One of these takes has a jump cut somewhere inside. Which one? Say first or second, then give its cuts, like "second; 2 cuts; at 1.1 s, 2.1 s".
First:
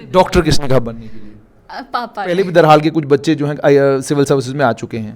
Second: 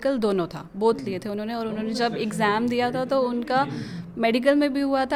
first; 1 cut; at 2.3 s